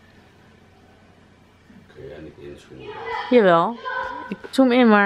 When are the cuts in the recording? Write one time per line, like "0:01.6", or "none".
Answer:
none